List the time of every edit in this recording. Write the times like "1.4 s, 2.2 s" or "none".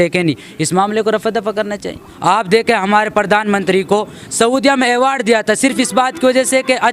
2.0 s